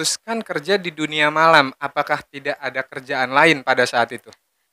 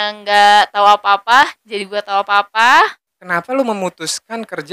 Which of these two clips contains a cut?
second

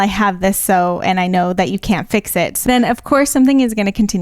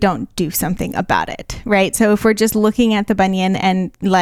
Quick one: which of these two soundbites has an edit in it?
first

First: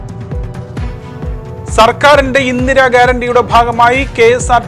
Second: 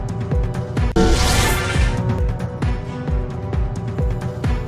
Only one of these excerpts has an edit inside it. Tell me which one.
first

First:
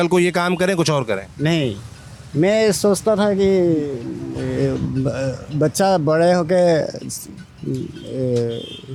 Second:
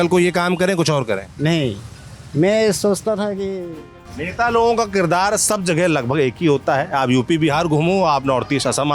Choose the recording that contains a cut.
second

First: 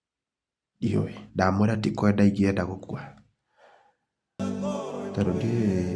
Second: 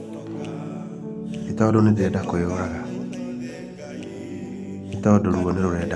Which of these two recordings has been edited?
first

